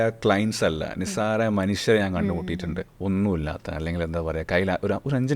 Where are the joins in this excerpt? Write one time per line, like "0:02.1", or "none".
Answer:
0:02.9